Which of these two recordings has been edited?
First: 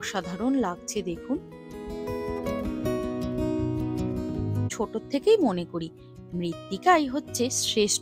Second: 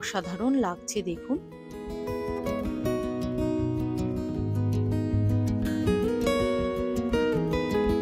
first; 1 cut; at 4.7 s

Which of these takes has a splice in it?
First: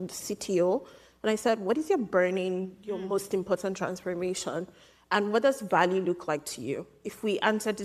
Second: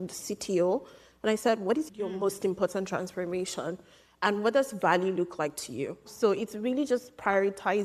second; 2 cuts; at 1.8 s, 6.1 s

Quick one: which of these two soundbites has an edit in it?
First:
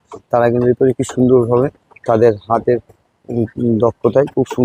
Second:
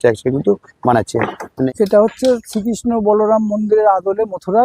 second; 1 cut; at 1.7 s

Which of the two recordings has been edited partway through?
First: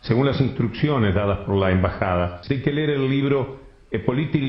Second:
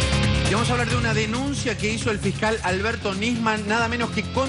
first; 1 cut; at 2.4 s

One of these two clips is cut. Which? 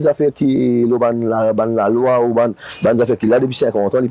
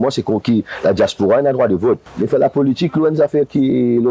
second; 1 cut; at 2.1 s

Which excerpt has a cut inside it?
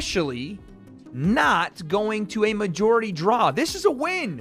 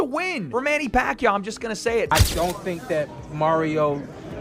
second; 1 cut; at 2.1 s

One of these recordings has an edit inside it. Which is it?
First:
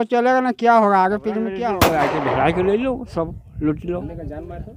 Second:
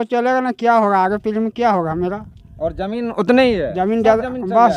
first; 1 cut; at 1.7 s

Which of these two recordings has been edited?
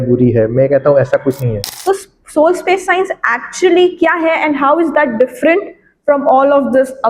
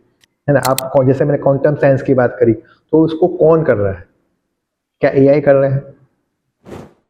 first; 1 cut; at 1.7 s

